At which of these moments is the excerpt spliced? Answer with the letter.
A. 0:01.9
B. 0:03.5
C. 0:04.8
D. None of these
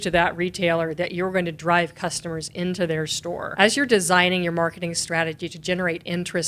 B